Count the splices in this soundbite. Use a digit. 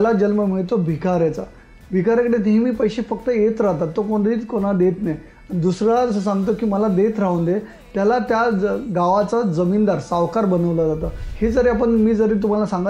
1